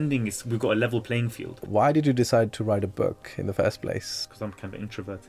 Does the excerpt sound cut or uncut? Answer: cut